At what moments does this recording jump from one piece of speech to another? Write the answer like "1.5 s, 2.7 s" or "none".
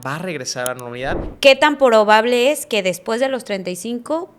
1.3 s